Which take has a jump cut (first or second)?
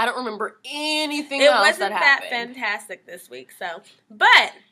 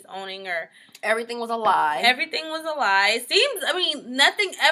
first